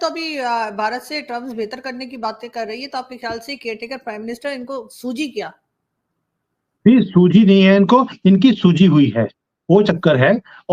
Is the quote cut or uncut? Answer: uncut